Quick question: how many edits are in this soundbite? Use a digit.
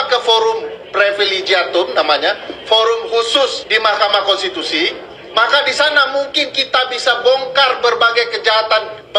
0